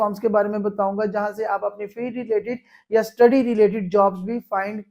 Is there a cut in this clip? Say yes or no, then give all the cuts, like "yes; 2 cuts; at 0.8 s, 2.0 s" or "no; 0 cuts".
no; 0 cuts